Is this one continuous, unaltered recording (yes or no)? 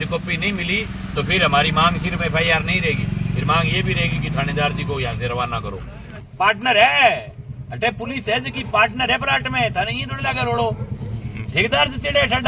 no